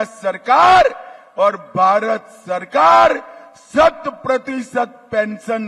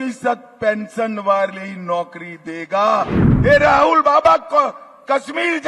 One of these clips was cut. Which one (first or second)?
second